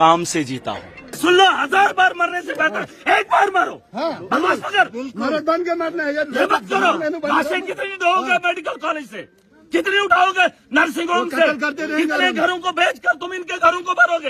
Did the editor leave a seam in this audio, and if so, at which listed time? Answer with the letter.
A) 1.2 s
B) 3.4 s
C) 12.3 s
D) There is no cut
A